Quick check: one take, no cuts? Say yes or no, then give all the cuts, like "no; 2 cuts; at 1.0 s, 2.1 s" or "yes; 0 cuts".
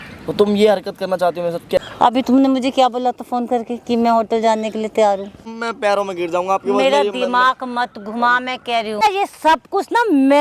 no; 3 cuts; at 1.8 s, 5.5 s, 9.0 s